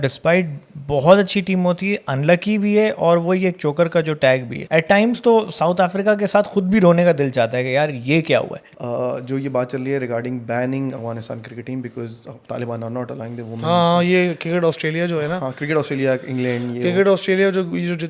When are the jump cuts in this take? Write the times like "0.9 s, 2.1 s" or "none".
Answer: 4.5 s, 8.6 s